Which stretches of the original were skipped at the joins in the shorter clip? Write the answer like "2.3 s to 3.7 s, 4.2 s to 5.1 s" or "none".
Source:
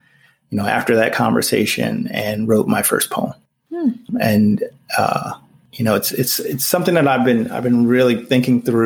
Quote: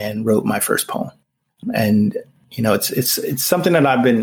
3.7 s to 4.0 s, 4.8 s to 5.5 s